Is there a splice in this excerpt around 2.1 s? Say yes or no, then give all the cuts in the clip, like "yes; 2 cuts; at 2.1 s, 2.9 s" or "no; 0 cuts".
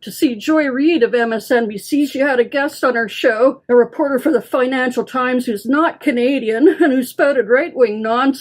yes; 2 cuts; at 2.1 s, 3.6 s